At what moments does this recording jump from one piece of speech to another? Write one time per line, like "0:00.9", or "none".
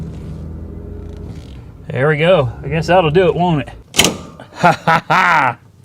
0:03.8